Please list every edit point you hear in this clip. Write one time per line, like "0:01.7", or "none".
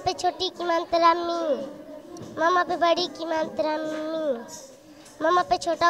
none